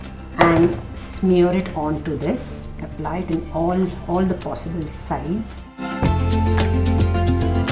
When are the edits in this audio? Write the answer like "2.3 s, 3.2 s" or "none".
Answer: none

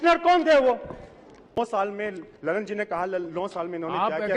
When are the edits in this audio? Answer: 1.4 s

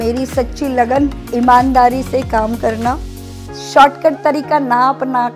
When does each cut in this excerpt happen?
1.2 s

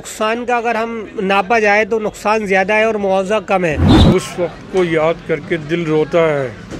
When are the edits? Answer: 3.9 s

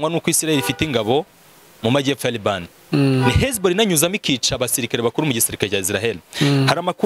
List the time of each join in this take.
none

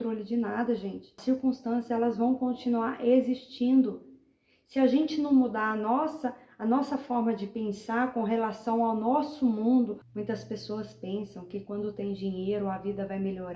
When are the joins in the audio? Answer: 1.1 s, 10.1 s

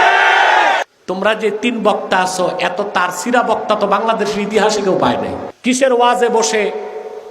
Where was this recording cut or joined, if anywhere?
0.8 s, 5.4 s

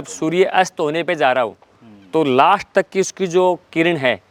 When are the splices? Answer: none

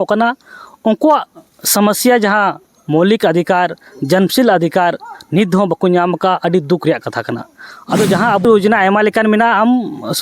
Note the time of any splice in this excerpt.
8.4 s

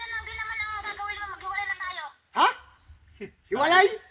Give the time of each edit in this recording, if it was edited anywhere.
none

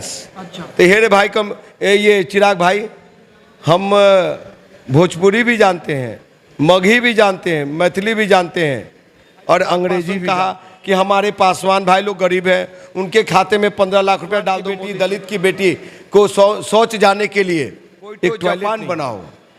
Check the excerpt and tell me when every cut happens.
10.2 s, 14.7 s, 18.6 s

